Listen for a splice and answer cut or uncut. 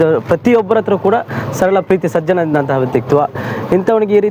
uncut